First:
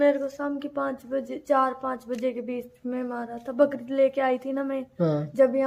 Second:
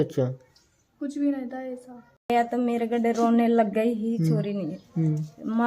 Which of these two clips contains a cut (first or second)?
second